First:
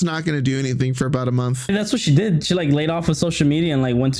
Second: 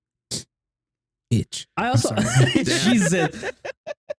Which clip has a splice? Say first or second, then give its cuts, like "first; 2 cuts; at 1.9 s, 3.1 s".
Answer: first; 1 cut; at 1.7 s